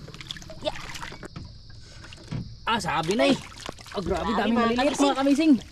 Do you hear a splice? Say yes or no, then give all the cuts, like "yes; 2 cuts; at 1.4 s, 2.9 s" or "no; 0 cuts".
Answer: yes; 1 cut; at 1.2 s